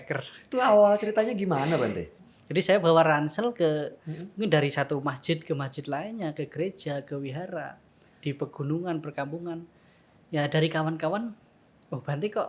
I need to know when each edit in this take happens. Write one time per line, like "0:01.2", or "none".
0:02.1